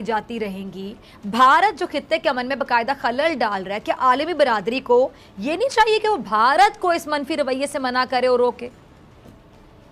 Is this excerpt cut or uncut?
uncut